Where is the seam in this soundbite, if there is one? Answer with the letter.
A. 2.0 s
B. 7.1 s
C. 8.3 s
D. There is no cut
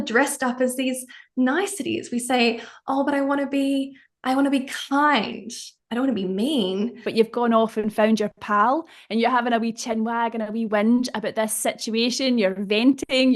B